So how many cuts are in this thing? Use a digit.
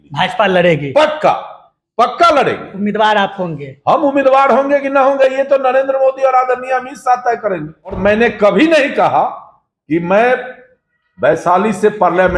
1